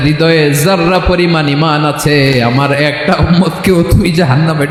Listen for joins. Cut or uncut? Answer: uncut